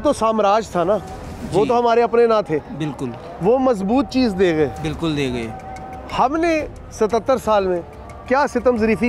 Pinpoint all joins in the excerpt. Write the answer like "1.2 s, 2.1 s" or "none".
none